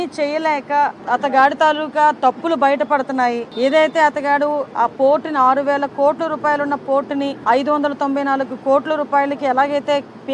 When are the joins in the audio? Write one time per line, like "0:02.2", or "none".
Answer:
0:01.0
0:03.5
0:07.4